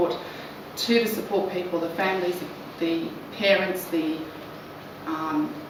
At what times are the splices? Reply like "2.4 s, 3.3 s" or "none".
none

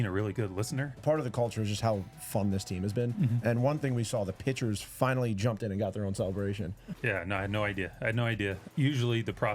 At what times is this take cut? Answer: 0.9 s, 6.6 s, 8.6 s

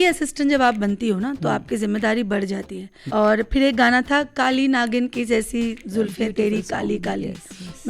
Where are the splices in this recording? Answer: 2.9 s

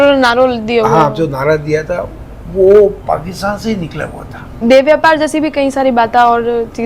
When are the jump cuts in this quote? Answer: 4.6 s

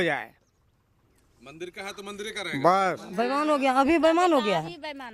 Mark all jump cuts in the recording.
3.1 s

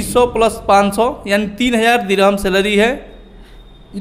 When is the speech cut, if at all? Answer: none

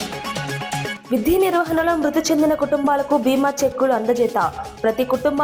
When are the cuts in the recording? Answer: 1.0 s

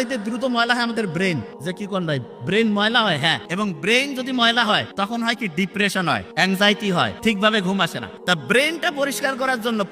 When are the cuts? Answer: 1.5 s, 3.4 s, 4.9 s, 6.3 s, 7.1 s, 8.1 s

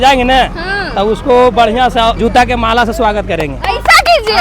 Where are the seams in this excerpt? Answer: 2.2 s

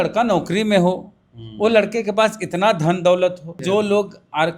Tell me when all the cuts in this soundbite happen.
3.6 s

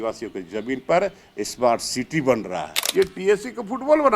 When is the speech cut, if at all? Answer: 2.8 s

